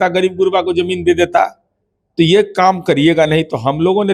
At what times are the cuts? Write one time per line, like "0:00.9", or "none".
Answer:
none